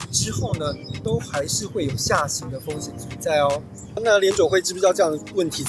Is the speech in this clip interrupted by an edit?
yes; 1 cut; at 4.0 s

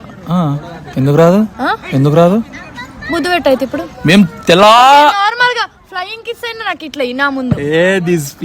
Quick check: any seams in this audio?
no; 0 cuts

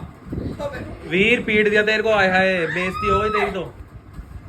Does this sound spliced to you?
no; 0 cuts

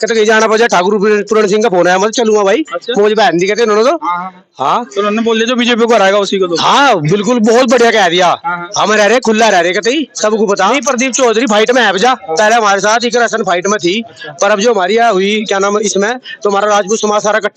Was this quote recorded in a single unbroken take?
no; 1 cut; at 10.7 s

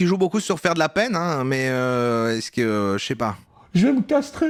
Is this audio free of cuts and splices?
yes; 0 cuts

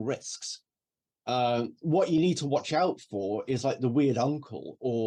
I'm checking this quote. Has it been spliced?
no; 0 cuts

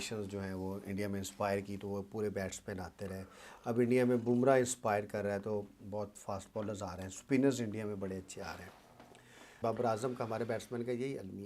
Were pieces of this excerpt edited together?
yes; 1 cut; at 9.5 s

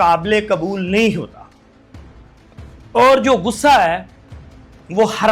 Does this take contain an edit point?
no; 0 cuts

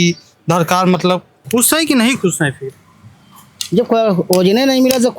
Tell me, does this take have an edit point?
yes; 1 cut; at 1.3 s

